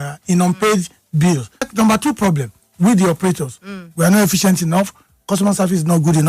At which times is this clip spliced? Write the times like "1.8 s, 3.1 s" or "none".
1.6 s